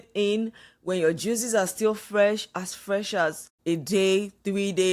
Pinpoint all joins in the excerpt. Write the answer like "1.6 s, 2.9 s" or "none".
3.5 s